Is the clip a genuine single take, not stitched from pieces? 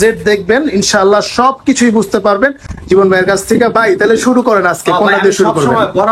yes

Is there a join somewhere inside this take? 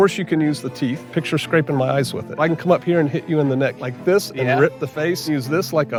no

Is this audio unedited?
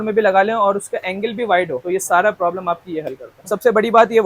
no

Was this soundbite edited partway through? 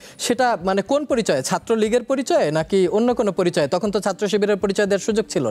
no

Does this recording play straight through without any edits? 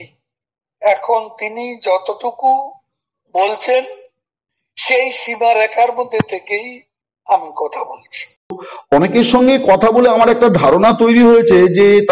no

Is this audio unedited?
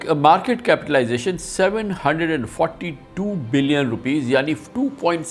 yes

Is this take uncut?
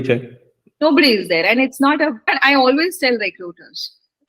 no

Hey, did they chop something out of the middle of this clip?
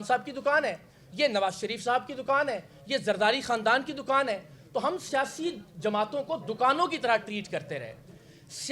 no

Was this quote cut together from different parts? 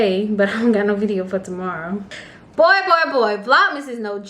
yes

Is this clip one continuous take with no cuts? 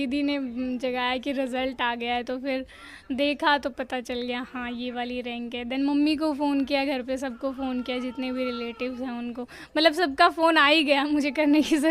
yes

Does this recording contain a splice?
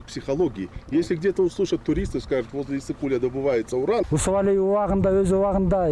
yes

